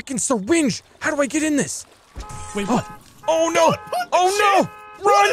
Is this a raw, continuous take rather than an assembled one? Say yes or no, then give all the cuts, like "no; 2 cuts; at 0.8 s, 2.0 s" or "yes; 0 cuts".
yes; 0 cuts